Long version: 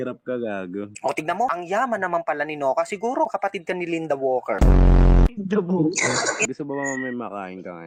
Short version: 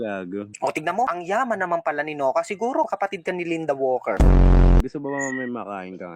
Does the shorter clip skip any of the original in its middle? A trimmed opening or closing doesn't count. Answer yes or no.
yes